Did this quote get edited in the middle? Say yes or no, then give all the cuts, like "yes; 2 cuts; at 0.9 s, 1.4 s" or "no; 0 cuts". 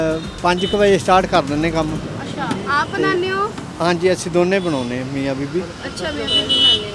no; 0 cuts